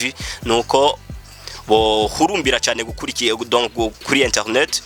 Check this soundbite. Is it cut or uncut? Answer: uncut